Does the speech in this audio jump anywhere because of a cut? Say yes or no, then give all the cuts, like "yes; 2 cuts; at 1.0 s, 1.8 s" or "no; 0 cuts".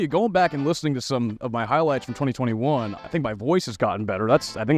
no; 0 cuts